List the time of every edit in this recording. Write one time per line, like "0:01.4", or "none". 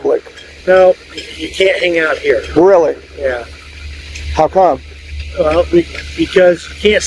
none